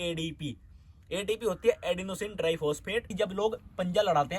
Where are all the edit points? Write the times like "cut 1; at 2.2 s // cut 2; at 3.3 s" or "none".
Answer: cut 1; at 3.1 s